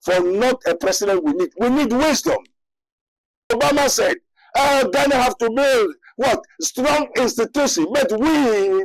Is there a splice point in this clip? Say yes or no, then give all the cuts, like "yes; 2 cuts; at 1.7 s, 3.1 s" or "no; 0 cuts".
yes; 1 cut; at 3.5 s